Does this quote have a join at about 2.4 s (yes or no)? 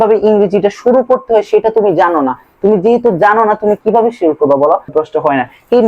no